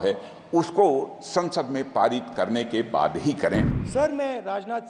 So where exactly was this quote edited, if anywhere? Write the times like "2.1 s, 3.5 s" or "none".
3.8 s

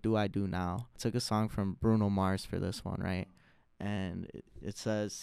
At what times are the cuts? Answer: 1.0 s

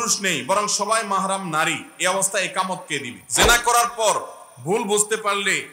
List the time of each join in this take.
3.2 s

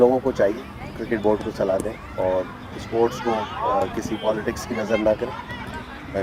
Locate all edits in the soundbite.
none

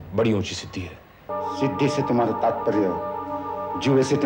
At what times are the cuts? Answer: 1.3 s

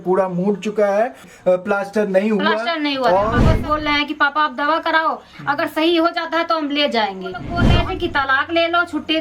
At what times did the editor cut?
1.2 s, 3.5 s, 7.6 s

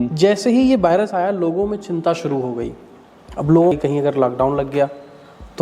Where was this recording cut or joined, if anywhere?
3.8 s

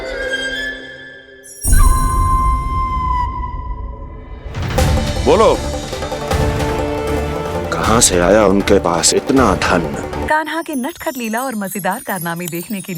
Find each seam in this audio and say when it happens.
10.2 s

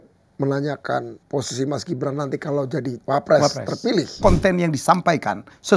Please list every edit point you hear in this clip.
1.2 s, 3.0 s, 4.2 s

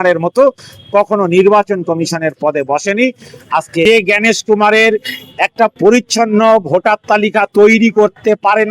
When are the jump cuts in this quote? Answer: 3.8 s

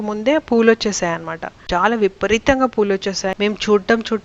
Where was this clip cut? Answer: 3.3 s

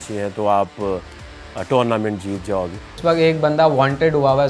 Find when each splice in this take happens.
2.9 s

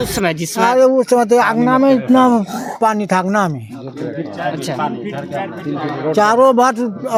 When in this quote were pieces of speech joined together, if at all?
none

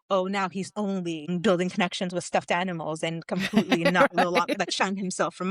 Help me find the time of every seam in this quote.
1.3 s

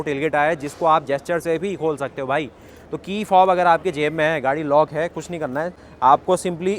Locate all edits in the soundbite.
5.8 s

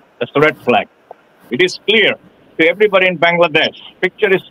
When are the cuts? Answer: 1.4 s

